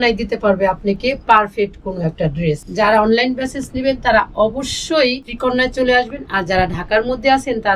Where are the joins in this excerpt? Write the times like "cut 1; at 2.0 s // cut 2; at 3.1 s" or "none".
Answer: cut 1; at 2.7 s // cut 2; at 5.3 s